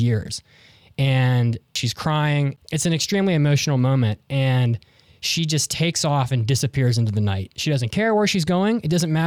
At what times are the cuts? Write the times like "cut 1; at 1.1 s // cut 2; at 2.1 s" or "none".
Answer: cut 1; at 1.8 s // cut 2; at 2.6 s // cut 3; at 7.5 s